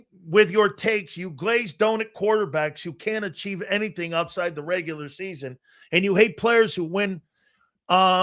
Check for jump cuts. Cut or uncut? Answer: uncut